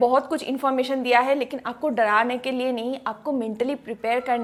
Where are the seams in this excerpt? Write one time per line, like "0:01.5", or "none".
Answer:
none